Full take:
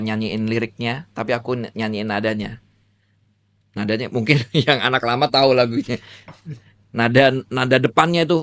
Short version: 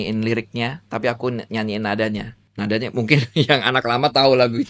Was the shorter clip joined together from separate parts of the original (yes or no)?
yes